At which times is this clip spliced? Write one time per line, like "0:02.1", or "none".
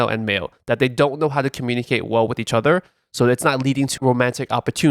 0:04.0